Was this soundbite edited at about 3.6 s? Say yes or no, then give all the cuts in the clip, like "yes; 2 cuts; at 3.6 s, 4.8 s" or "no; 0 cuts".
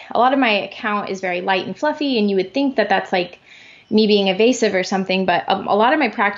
no; 0 cuts